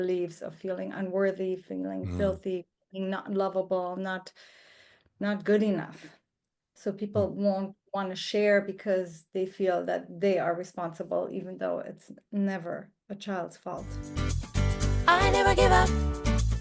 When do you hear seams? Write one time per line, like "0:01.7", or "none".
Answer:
0:14.1